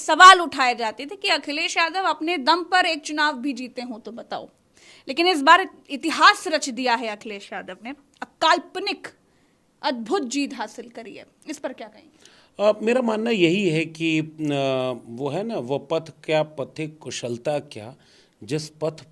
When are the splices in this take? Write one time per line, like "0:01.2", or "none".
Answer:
none